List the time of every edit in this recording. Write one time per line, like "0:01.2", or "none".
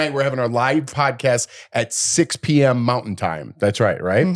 0:00.9